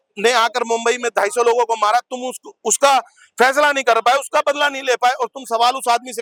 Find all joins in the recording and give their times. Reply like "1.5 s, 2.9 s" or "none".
none